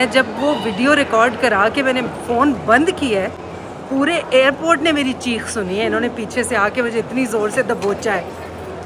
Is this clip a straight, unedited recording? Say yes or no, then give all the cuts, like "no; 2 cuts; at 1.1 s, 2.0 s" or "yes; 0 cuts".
yes; 0 cuts